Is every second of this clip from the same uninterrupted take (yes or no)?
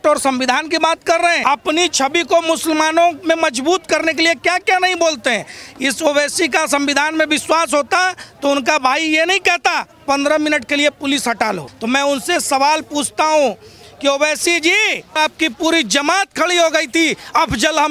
no